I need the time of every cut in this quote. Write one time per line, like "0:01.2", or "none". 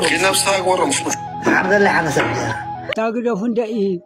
0:02.9